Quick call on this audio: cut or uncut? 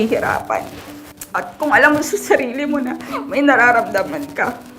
cut